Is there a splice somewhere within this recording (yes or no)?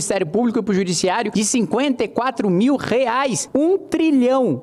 yes